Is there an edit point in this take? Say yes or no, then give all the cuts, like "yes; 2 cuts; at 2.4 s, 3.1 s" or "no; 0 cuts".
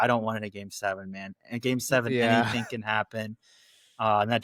no; 0 cuts